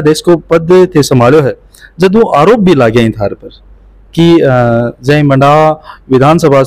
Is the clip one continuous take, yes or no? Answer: yes